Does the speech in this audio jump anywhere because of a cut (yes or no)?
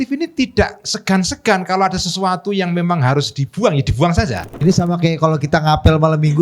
yes